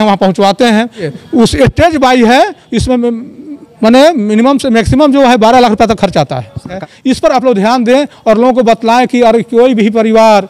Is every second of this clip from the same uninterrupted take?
no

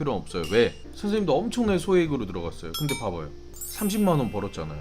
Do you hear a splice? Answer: yes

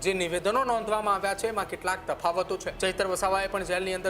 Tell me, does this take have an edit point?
yes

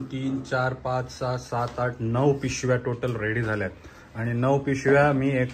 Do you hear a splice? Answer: no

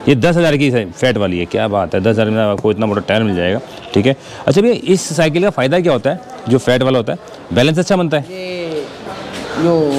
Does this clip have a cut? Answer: no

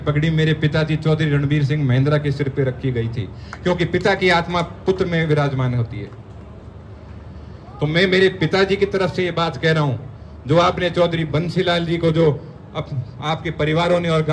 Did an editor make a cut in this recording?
no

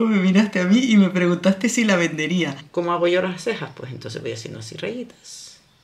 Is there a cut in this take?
yes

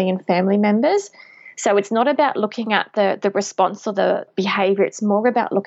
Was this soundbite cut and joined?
yes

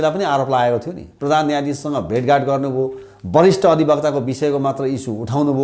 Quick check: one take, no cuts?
yes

